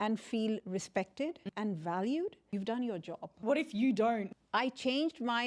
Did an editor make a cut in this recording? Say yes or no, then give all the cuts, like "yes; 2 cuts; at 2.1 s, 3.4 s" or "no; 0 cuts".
yes; 4 cuts; at 1.4 s, 2.5 s, 3.4 s, 4.3 s